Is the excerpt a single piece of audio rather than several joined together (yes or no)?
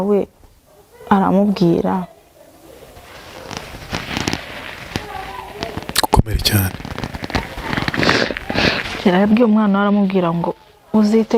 yes